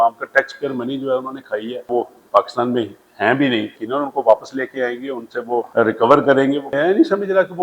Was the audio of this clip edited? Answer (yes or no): yes